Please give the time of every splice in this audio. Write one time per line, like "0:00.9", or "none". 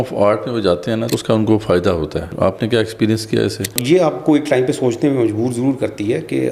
0:01.1
0:02.3
0:03.8